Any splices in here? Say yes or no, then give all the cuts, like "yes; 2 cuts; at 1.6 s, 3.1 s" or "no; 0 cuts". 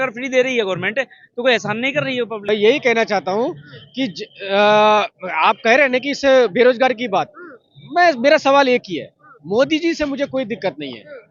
no; 0 cuts